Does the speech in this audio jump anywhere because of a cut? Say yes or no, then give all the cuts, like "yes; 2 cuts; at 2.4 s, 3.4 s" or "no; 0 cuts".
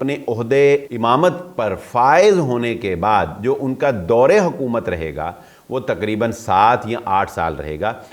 yes; 1 cut; at 0.9 s